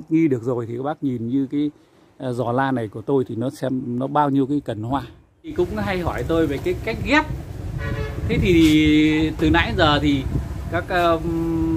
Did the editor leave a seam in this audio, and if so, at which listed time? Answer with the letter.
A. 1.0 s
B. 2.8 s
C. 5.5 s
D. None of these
C